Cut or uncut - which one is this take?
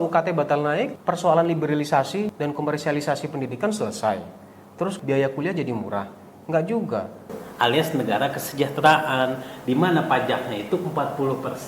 cut